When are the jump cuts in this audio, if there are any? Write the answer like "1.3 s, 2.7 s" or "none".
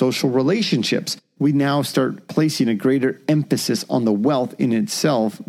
1.2 s